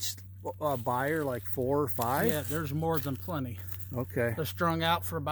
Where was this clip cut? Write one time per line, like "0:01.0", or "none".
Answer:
none